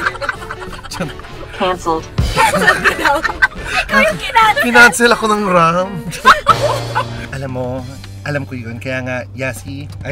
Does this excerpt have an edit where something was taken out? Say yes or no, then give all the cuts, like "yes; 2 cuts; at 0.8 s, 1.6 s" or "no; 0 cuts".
yes; 1 cut; at 7.2 s